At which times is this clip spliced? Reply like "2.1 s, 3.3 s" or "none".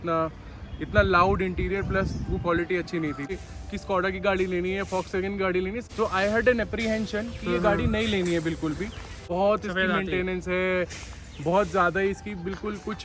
3.3 s, 5.8 s, 9.2 s